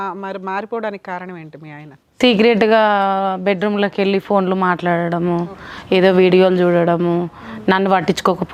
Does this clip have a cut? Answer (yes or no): no